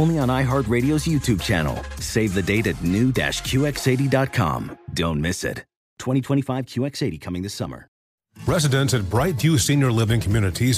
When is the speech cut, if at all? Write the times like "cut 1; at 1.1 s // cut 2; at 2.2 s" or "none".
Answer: cut 1; at 8.0 s